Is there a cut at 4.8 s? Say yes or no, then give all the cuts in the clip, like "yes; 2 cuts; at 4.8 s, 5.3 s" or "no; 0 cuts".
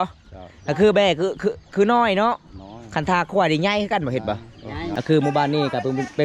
yes; 1 cut; at 4.8 s